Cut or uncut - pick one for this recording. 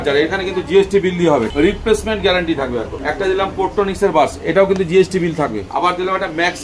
cut